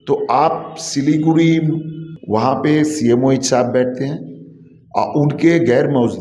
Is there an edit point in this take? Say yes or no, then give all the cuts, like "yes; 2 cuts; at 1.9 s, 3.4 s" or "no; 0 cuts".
yes; 1 cut; at 2.1 s